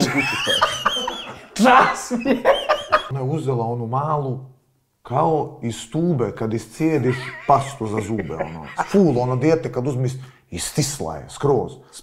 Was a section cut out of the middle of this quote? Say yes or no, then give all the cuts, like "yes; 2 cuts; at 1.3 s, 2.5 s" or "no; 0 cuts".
yes; 1 cut; at 3.1 s